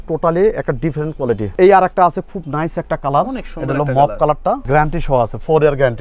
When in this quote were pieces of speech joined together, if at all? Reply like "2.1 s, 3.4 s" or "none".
1.5 s, 4.7 s